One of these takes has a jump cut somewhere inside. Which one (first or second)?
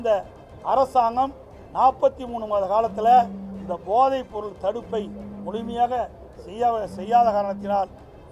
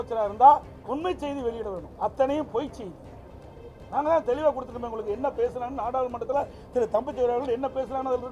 second